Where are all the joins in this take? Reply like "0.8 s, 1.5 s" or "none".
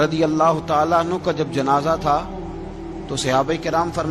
none